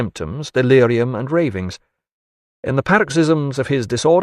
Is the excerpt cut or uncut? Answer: cut